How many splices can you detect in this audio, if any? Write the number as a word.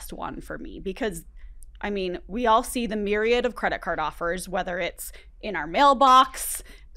zero